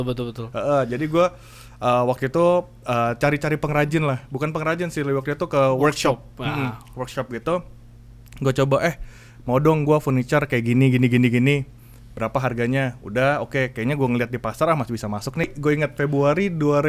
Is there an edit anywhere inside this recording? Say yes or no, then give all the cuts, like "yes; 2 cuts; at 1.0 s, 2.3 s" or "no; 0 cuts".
yes; 1 cut; at 15.5 s